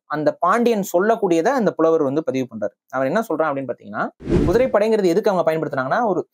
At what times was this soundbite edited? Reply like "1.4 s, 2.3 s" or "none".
4.3 s